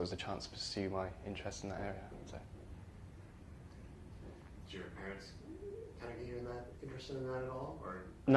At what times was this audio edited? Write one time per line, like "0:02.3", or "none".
0:01.2